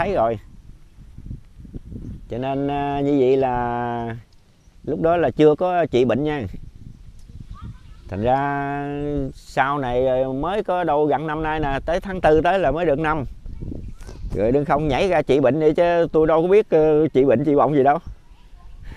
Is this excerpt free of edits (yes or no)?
yes